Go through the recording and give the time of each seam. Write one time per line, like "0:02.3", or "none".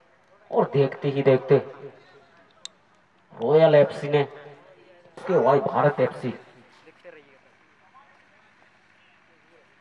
0:05.2